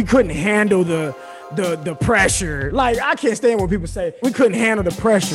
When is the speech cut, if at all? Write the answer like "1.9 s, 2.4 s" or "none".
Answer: 4.2 s